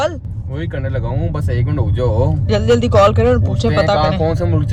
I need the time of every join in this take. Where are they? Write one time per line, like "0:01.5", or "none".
none

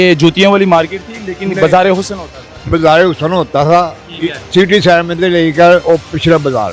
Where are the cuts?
0:05.8

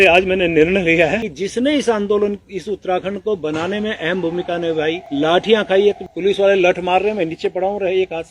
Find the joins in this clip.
0:01.3
0:05.0
0:06.0

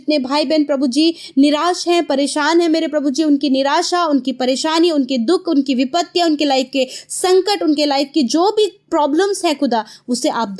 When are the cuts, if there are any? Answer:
none

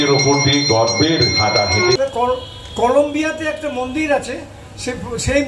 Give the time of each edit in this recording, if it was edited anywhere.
0:02.0

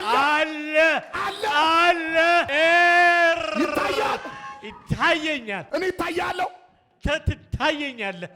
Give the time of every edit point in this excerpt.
0:02.5

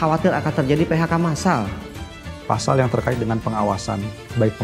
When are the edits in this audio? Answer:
0:01.9

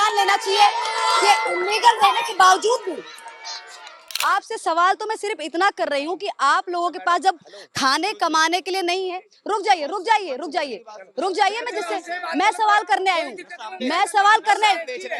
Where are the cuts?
0:04.1

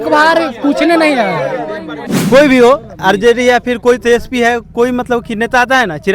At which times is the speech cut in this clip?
0:02.1

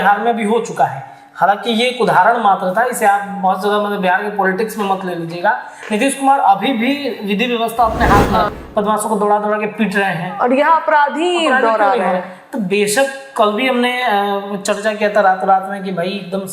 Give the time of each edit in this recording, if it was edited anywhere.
0:08.5

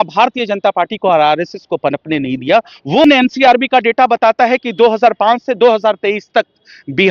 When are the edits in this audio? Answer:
0:03.0

